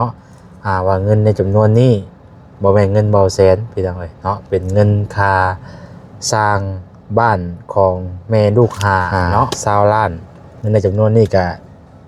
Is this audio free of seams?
no; 1 cut; at 9.6 s

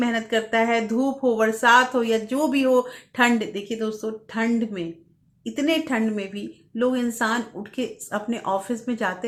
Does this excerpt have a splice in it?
no; 0 cuts

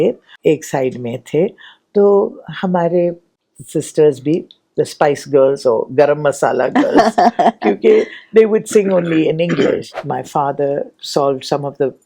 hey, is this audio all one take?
no; 1 cut; at 9.9 s

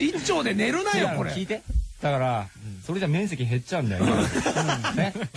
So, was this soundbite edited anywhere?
yes; 1 cut; at 1.6 s

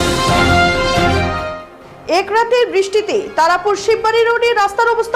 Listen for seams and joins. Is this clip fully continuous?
no; 1 cut; at 1.5 s

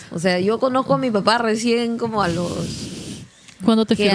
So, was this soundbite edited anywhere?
no; 0 cuts

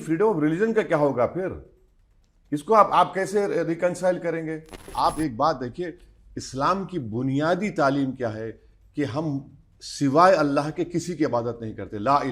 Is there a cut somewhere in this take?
yes; 1 cut; at 4.9 s

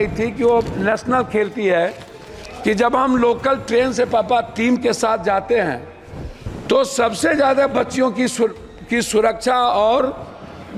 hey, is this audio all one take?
yes; 0 cuts

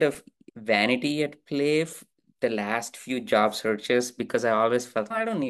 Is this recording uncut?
yes; 0 cuts

